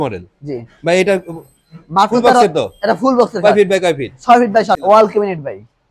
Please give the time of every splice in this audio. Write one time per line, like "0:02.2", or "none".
0:04.8